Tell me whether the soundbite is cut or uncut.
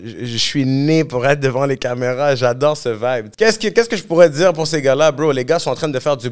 cut